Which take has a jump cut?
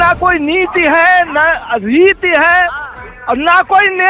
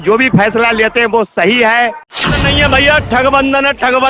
second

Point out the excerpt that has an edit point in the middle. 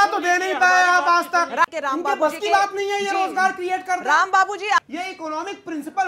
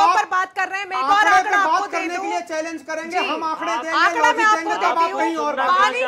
first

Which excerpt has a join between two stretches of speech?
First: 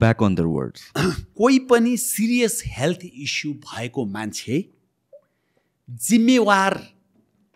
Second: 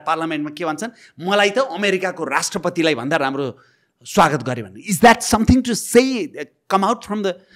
first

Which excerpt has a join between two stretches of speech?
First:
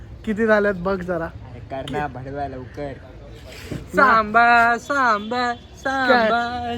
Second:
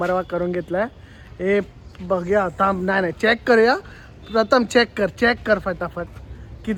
first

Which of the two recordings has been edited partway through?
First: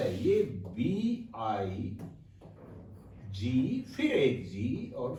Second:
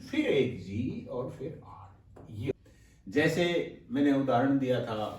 second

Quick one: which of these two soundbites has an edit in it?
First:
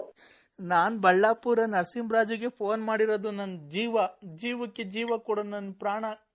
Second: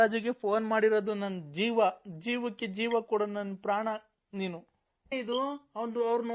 second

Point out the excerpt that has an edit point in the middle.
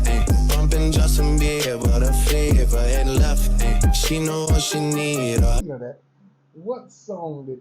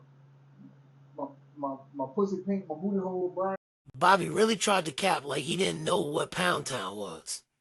first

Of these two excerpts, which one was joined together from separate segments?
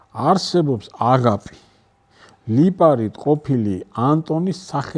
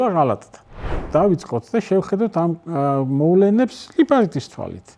second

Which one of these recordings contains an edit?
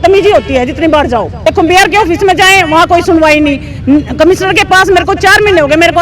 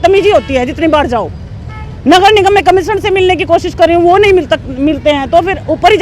first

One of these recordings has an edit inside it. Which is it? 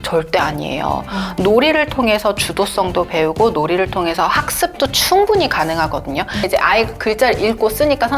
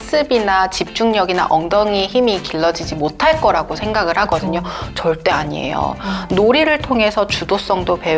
first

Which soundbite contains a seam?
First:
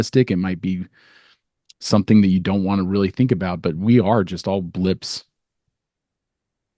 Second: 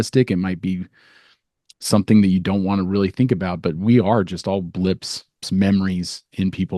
second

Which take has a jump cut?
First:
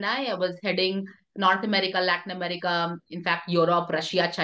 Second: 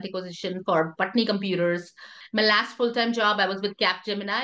second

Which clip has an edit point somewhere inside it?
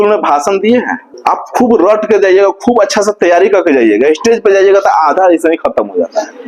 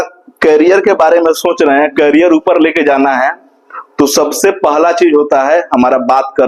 first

